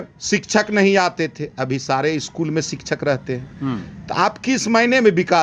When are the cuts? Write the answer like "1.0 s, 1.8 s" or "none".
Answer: none

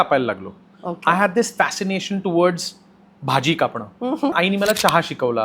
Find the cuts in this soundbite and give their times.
4.3 s

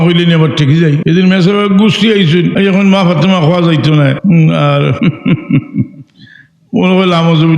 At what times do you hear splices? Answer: 1.0 s, 2.5 s, 4.2 s, 5.0 s

